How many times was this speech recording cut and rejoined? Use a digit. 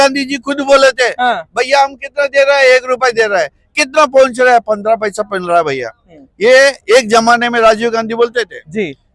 0